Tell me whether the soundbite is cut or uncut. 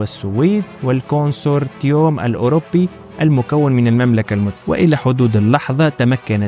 cut